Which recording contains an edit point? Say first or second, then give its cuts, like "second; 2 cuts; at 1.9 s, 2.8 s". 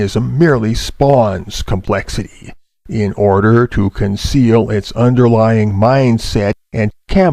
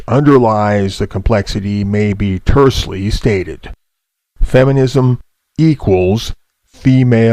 second; 1 cut; at 3.9 s